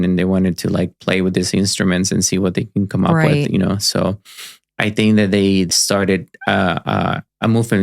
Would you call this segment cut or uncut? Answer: cut